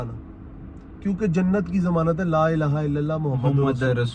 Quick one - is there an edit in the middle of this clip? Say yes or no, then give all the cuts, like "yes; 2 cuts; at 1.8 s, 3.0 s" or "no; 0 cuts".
no; 0 cuts